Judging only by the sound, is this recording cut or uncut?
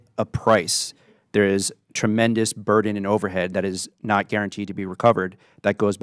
uncut